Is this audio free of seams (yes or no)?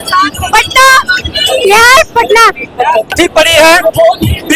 no